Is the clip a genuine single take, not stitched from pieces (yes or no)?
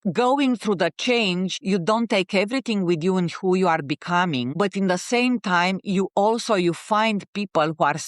no